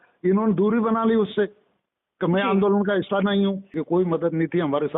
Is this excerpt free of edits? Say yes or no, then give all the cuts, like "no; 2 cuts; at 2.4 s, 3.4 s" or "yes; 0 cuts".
no; 1 cut; at 3.8 s